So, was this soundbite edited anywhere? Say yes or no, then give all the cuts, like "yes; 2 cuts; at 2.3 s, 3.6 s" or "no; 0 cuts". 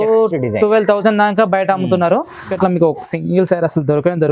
yes; 1 cut; at 2.5 s